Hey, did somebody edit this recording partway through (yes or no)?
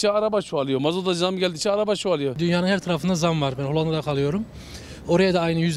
yes